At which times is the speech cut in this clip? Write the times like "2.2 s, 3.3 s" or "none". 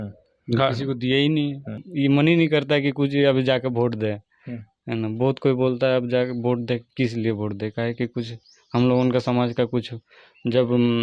1.9 s